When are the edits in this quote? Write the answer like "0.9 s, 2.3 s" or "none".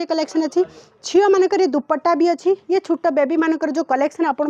none